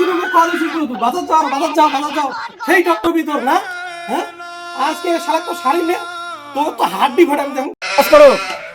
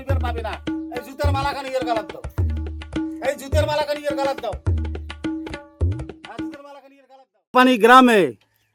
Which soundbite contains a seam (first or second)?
first